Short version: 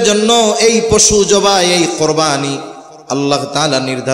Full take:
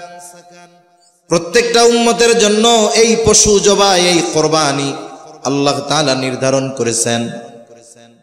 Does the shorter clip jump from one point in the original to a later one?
no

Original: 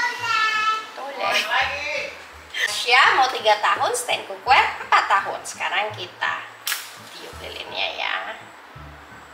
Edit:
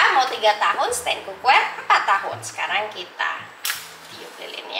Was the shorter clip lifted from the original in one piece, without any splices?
yes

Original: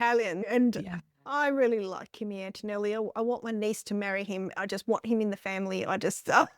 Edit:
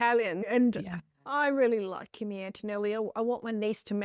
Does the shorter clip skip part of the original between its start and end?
no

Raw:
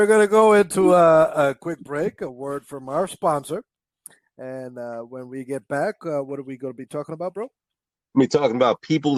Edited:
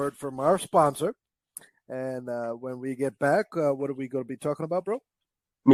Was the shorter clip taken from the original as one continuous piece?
yes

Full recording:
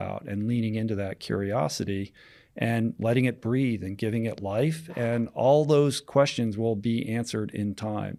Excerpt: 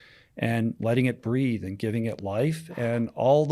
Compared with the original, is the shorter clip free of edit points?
yes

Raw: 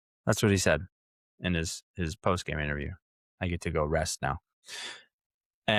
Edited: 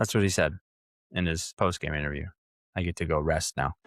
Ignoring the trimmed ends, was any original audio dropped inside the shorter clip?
yes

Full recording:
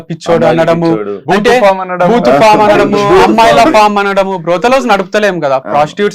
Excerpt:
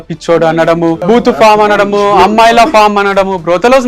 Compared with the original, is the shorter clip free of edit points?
no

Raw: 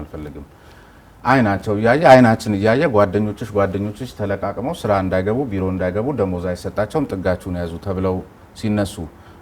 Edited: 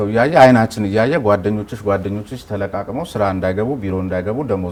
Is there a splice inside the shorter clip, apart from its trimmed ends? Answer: no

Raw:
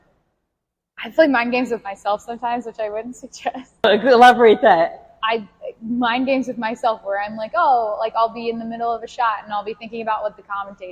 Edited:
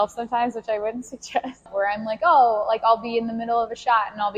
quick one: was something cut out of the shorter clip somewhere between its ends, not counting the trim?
yes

